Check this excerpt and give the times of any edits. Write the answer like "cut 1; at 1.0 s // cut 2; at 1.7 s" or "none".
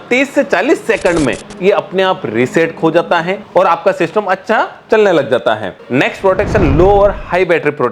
none